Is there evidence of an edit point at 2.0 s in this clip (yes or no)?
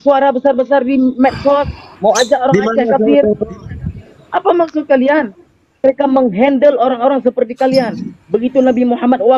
no